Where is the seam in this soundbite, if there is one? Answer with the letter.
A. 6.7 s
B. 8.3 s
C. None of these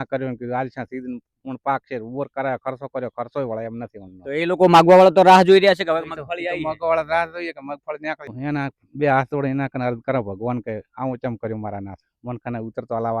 B